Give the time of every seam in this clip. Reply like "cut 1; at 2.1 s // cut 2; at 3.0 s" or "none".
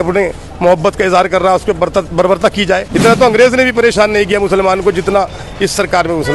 cut 1; at 2.9 s